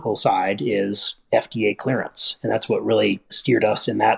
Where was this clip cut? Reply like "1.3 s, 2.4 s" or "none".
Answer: none